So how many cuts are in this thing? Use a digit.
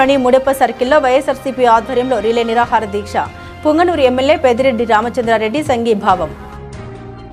0